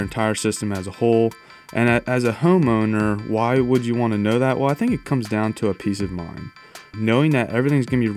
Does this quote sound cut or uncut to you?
cut